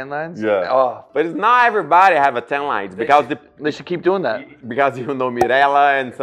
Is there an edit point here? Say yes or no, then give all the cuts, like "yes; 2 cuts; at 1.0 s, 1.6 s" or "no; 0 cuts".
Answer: no; 0 cuts